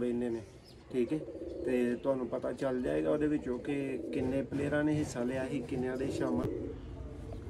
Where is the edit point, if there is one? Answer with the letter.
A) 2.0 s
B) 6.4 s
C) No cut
B